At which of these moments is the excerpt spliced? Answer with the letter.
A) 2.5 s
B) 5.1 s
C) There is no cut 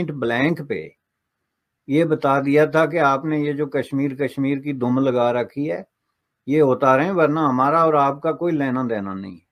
C